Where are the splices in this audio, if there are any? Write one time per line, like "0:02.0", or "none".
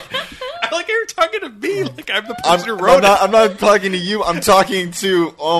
none